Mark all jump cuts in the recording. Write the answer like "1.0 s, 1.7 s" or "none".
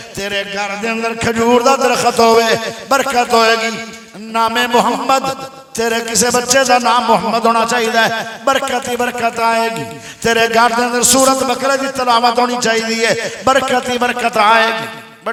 none